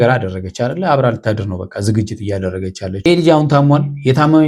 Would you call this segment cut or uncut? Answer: cut